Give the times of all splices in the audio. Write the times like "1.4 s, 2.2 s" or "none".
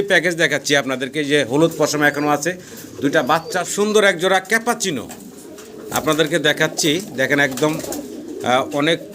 3.7 s